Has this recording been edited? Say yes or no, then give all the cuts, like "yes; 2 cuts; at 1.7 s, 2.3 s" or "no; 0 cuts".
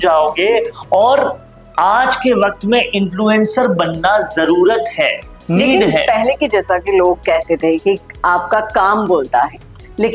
no; 0 cuts